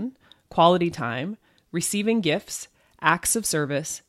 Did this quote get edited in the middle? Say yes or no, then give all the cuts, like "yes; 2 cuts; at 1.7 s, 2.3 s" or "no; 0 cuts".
no; 0 cuts